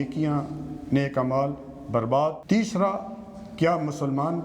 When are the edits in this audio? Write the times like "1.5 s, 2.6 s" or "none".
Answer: 2.4 s